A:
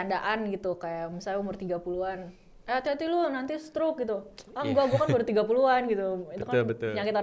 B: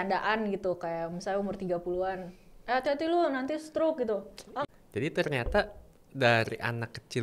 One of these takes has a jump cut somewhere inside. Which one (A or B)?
B